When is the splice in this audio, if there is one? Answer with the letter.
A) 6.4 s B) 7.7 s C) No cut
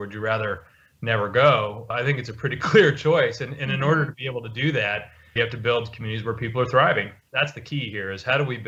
C